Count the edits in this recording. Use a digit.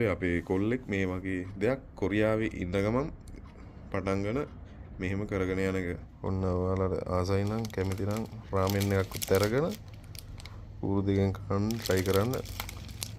1